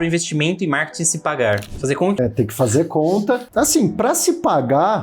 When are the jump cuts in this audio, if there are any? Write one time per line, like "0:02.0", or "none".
0:02.2
0:03.5